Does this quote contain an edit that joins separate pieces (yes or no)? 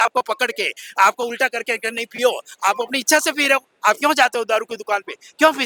no